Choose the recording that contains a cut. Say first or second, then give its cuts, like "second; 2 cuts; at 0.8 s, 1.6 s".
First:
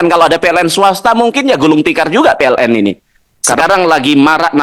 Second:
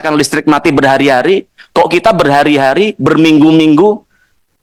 first; 1 cut; at 3.6 s